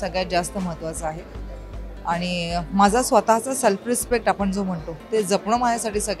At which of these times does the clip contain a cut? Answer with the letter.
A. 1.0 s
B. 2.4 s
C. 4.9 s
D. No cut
D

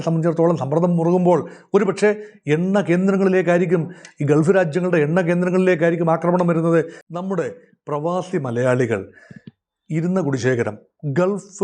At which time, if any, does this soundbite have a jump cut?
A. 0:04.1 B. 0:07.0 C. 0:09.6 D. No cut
B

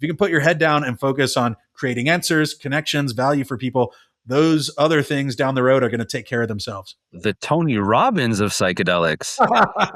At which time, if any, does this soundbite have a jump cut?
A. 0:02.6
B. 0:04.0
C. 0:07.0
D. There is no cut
D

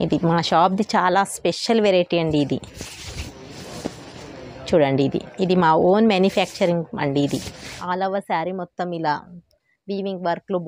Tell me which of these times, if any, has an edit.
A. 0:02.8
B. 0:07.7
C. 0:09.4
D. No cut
B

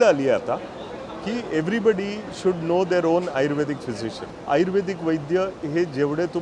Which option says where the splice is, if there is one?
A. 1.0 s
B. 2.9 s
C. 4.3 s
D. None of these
C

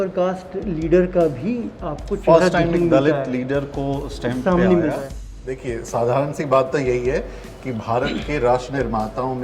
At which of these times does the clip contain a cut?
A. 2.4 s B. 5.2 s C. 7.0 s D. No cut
B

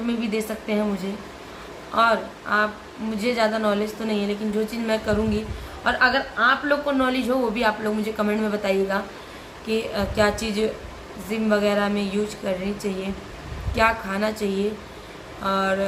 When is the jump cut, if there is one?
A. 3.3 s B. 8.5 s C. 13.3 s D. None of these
D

